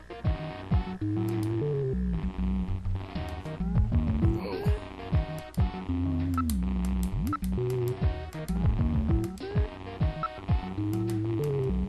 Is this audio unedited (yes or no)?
no